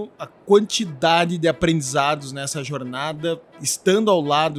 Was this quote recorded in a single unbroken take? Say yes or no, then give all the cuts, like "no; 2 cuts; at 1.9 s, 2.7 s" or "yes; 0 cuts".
yes; 0 cuts